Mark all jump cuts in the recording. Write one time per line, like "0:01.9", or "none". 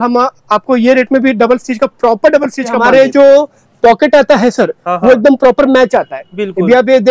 0:02.8